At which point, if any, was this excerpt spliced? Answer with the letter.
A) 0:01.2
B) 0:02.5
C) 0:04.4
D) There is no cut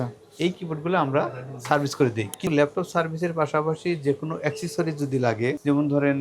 B